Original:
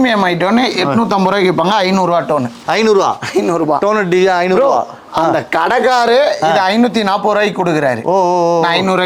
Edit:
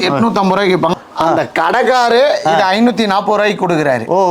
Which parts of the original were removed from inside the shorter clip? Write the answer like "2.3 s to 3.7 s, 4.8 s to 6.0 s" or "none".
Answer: 1.7 s to 4.9 s